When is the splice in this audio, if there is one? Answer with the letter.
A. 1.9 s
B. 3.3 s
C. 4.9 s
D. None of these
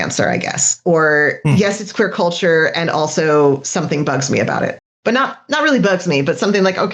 D